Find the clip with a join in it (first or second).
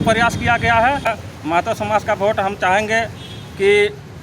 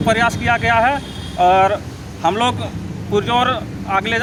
first